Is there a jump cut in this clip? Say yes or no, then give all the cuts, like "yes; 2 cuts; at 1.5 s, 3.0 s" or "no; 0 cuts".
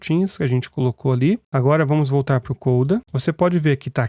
yes; 2 cuts; at 1.5 s, 3.1 s